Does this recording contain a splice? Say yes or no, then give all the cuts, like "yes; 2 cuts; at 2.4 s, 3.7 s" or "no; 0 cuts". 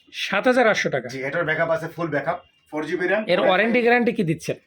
yes; 1 cut; at 2.6 s